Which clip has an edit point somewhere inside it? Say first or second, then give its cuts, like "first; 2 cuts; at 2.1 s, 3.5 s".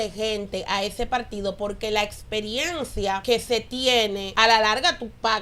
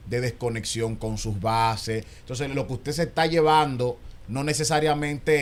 first; 2 cuts; at 3.2 s, 4.2 s